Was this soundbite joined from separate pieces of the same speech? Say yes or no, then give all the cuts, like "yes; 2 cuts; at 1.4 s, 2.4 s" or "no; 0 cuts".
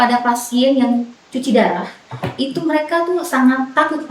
no; 0 cuts